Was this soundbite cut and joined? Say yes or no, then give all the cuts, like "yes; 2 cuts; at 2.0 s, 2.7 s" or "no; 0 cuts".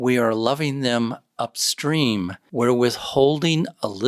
yes; 1 cut; at 2.4 s